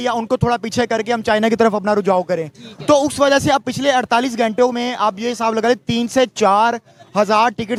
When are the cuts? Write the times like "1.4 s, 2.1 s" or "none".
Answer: none